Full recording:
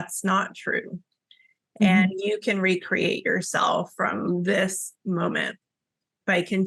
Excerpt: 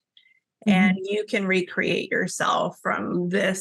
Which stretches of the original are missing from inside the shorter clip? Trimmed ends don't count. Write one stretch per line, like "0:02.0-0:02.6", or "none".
none